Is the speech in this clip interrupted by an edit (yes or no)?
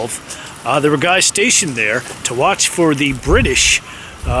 no